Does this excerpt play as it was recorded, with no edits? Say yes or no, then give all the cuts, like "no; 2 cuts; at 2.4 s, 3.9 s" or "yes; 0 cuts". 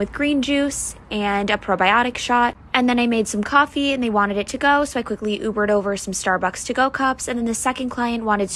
yes; 0 cuts